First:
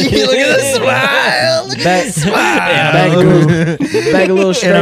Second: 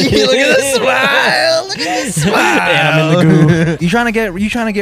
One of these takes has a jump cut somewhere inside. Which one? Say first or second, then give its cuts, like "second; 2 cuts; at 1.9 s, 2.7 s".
second; 1 cut; at 3.8 s